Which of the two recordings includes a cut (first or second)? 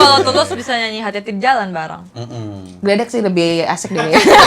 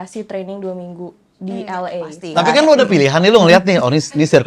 second